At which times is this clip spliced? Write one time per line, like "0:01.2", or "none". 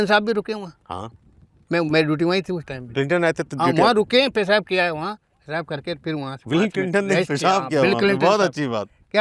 none